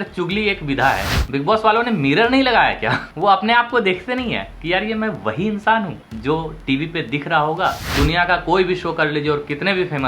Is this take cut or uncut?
cut